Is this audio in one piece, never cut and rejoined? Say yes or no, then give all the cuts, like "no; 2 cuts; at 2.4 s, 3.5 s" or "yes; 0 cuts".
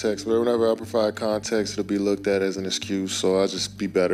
yes; 0 cuts